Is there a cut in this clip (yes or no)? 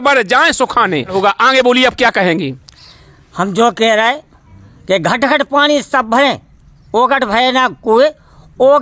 yes